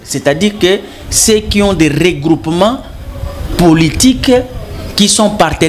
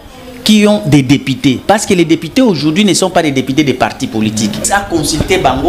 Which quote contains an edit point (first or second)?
second